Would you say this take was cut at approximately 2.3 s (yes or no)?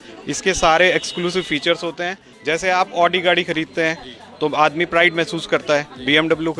yes